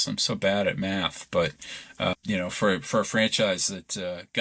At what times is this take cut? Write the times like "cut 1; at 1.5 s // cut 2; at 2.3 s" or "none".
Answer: cut 1; at 2.1 s